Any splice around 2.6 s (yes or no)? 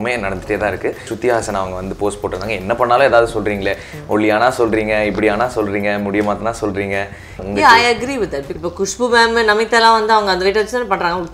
no